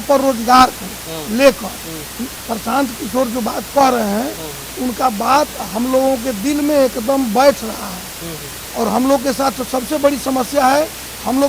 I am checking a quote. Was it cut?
no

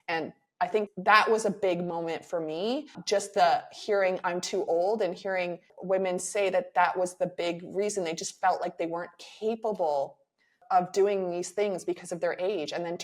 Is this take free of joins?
no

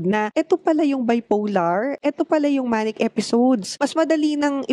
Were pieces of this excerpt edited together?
yes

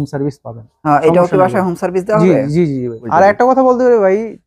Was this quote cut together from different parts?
yes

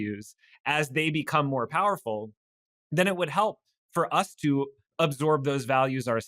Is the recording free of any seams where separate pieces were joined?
no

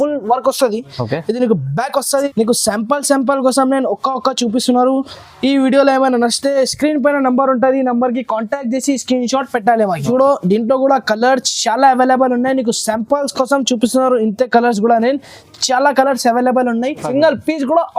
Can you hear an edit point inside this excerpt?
yes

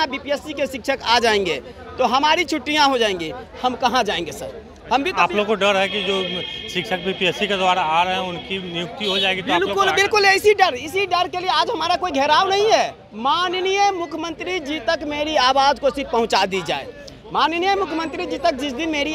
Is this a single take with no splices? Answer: yes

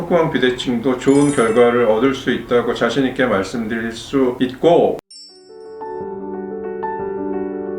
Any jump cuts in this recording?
yes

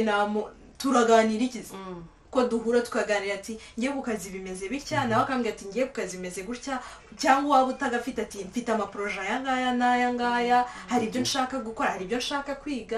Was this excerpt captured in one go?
yes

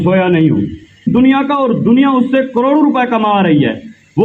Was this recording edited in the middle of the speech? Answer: yes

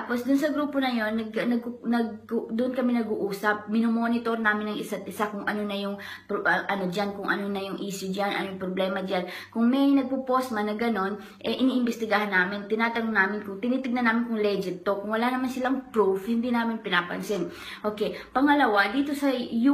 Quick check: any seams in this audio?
yes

